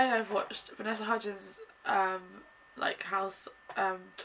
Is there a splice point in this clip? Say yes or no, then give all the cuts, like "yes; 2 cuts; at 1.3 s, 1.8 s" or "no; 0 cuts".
no; 0 cuts